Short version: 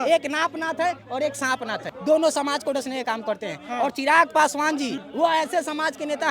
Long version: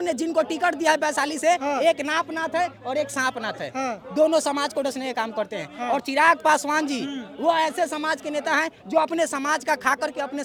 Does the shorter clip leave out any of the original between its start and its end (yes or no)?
yes